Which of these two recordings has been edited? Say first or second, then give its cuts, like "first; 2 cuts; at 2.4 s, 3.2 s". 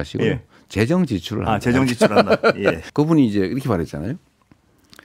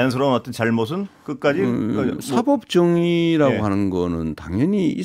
first; 1 cut; at 2.8 s